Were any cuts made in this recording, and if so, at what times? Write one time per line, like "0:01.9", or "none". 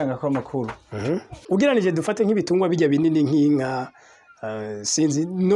0:01.3